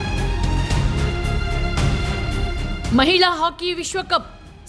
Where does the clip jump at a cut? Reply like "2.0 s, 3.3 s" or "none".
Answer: 1.2 s